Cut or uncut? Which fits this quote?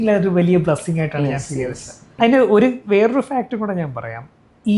cut